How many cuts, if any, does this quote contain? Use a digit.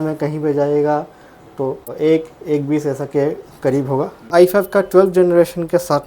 2